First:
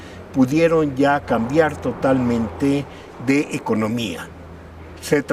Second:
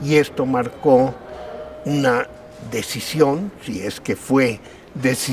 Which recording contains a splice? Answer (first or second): first